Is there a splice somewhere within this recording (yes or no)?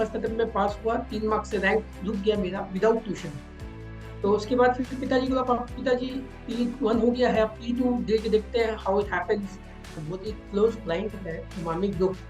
yes